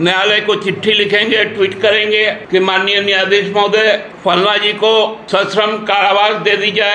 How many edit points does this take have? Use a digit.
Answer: 3